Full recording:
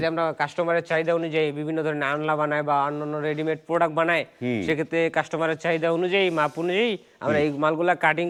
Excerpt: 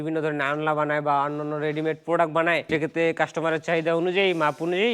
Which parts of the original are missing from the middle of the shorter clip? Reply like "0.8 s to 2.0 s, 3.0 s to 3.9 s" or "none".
4.3 s to 4.6 s